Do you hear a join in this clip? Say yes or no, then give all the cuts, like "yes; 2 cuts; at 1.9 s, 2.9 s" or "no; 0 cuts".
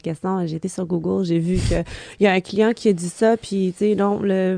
no; 0 cuts